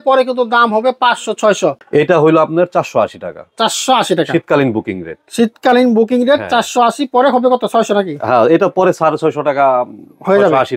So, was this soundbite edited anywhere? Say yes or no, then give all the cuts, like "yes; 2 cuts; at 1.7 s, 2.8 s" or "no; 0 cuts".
yes; 1 cut; at 1.8 s